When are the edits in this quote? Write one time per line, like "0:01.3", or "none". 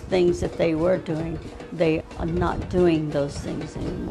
0:02.0